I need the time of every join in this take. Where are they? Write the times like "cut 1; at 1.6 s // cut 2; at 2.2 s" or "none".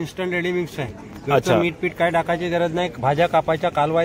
none